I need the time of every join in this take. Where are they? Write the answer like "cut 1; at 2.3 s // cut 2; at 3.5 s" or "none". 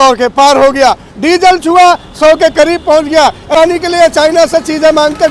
cut 1; at 3.5 s